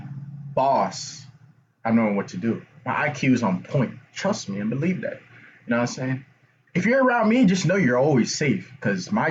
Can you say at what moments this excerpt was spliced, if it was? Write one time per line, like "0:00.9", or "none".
none

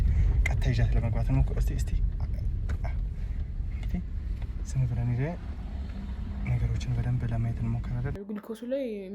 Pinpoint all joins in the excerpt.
0:08.1

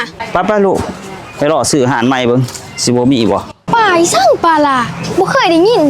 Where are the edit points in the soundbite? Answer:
0:03.6

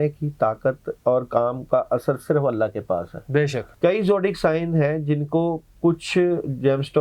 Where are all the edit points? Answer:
0:03.6

